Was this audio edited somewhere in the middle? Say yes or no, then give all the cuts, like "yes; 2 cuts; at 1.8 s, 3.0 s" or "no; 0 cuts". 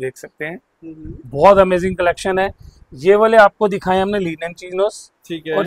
no; 0 cuts